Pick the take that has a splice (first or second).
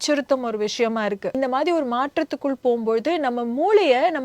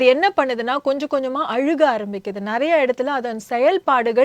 first